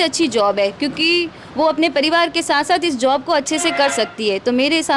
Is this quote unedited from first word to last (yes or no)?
yes